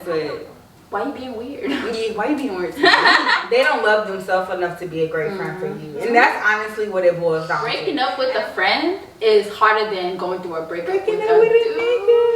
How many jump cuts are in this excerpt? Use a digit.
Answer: 2